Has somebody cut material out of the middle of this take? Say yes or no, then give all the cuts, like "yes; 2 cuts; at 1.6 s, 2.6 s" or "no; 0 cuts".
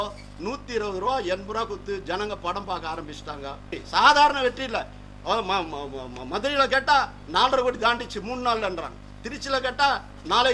yes; 1 cut; at 3.8 s